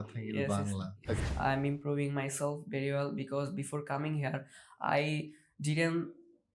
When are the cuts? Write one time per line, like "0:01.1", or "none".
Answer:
0:01.3